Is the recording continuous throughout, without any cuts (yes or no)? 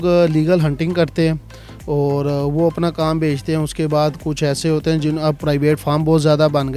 yes